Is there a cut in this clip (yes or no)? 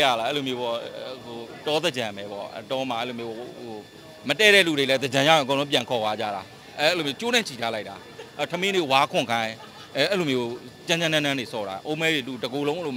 no